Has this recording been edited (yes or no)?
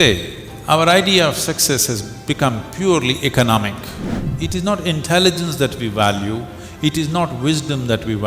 yes